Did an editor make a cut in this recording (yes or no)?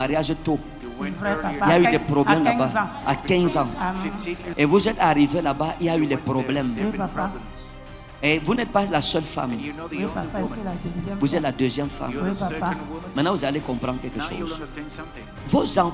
yes